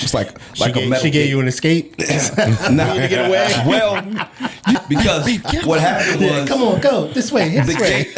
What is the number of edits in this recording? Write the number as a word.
one